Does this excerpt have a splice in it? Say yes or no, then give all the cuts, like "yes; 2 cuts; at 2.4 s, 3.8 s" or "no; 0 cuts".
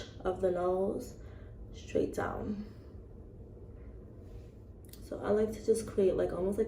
yes; 1 cut; at 4.8 s